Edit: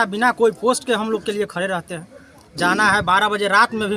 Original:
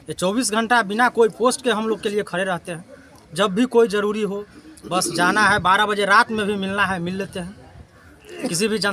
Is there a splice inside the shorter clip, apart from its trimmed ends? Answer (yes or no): yes